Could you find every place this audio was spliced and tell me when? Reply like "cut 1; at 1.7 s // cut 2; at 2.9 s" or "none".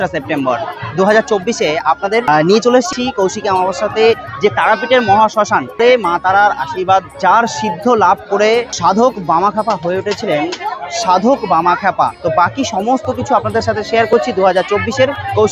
cut 1; at 2.2 s // cut 2; at 2.9 s // cut 3; at 5.8 s // cut 4; at 7.1 s // cut 5; at 8.7 s // cut 6; at 12.2 s